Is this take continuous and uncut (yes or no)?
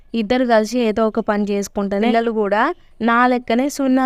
no